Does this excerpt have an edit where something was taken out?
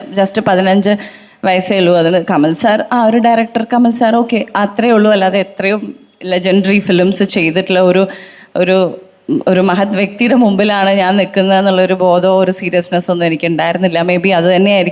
no; 0 cuts

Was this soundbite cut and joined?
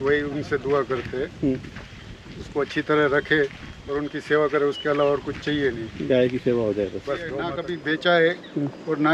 yes; 1 cut; at 7.7 s

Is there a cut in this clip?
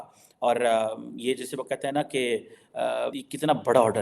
no; 0 cuts

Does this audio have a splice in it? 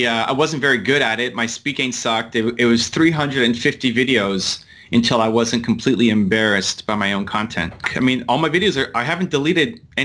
yes; 1 cut; at 7.8 s

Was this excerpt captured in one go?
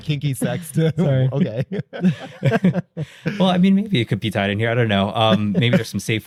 yes; 0 cuts

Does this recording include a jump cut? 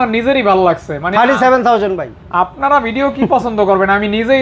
no; 0 cuts

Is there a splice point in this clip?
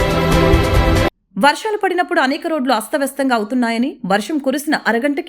yes; 1 cut; at 1.2 s

